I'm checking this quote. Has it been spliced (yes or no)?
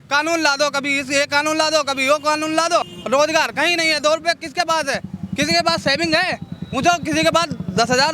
no